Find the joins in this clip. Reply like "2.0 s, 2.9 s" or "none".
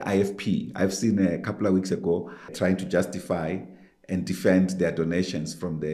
2.5 s